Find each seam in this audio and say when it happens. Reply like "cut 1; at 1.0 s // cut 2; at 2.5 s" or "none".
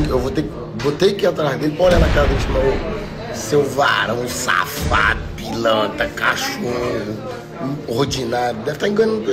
cut 1; at 7.5 s